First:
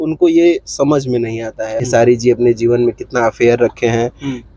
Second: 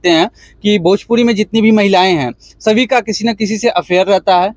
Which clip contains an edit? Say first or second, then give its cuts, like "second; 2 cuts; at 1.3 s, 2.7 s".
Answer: first; 1 cut; at 1.8 s